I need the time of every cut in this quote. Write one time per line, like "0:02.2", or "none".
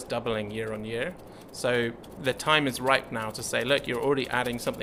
none